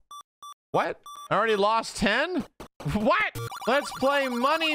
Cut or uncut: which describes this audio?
cut